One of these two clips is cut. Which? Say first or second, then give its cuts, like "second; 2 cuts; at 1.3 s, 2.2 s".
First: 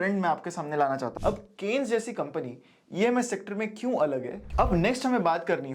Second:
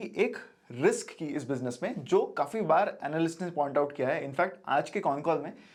first; 2 cuts; at 1.1 s, 4.4 s